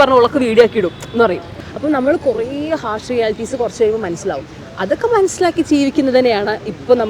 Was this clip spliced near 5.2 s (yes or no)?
no